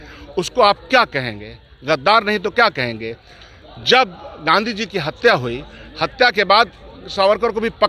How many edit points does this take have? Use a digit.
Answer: 0